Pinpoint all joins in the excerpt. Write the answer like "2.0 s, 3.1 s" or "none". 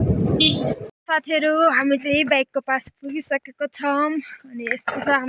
0.9 s